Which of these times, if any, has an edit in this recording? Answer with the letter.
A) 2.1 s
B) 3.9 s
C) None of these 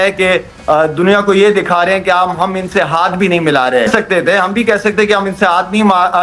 B